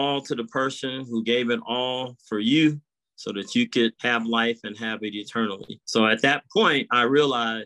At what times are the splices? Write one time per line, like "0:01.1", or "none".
0:04.0
0:05.7